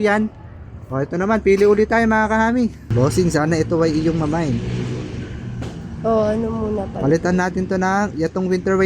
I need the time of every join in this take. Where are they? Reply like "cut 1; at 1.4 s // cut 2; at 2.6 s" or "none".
cut 1; at 2.9 s